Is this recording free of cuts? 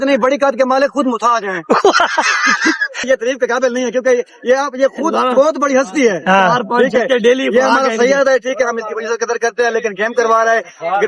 no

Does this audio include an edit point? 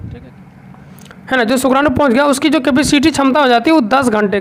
no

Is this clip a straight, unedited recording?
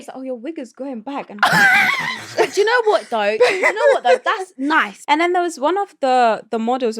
no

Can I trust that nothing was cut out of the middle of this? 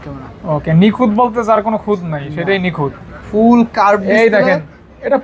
yes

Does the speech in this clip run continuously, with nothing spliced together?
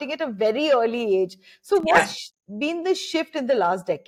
yes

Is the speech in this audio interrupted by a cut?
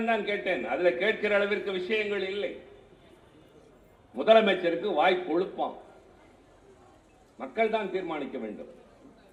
no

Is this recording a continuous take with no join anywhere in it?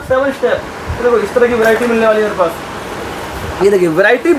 yes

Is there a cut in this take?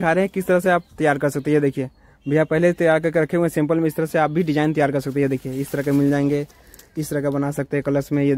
no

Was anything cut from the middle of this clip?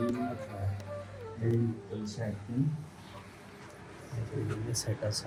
no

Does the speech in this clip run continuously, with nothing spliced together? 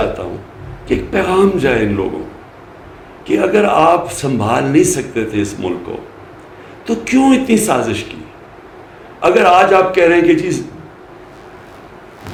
yes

